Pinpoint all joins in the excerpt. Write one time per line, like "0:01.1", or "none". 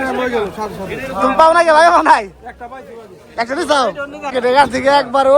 0:04.3